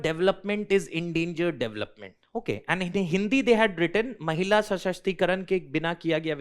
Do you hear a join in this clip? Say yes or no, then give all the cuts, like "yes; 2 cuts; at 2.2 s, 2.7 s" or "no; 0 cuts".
no; 0 cuts